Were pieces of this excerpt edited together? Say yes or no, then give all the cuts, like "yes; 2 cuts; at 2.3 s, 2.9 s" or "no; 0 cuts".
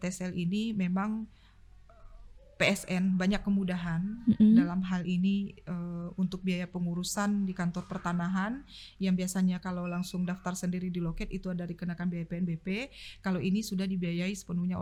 no; 0 cuts